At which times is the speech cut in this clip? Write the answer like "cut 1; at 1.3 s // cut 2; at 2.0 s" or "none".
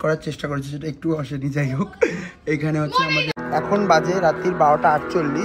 cut 1; at 3.3 s